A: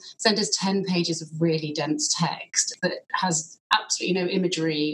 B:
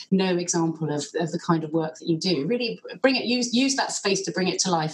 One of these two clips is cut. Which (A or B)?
A